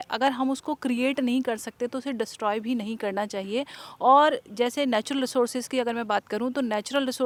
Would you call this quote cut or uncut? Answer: uncut